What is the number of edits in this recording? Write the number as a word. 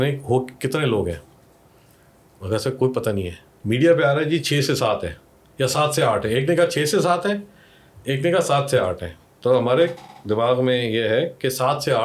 zero